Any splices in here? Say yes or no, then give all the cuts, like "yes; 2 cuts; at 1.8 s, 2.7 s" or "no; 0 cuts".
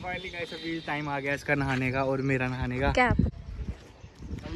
yes; 1 cut; at 3.3 s